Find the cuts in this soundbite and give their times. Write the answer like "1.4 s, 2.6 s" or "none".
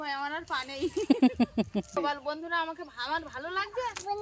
1.9 s